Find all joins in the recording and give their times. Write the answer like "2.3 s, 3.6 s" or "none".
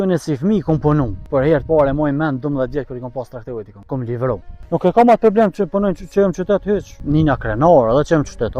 1.3 s, 3.8 s, 4.6 s, 7.0 s